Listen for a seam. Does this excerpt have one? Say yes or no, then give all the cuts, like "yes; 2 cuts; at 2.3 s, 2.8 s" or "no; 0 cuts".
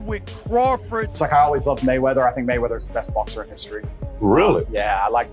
yes; 1 cut; at 1.1 s